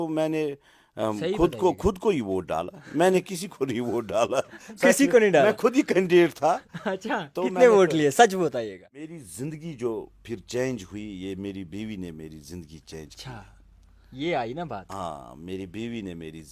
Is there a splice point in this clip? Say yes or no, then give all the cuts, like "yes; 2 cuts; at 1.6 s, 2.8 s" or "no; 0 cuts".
yes; 1 cut; at 9.1 s